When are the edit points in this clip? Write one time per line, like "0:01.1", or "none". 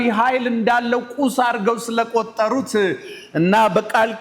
none